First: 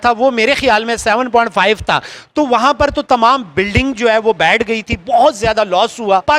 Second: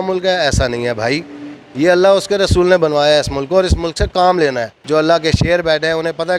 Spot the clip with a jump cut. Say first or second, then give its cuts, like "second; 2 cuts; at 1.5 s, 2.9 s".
second; 1 cut; at 4.8 s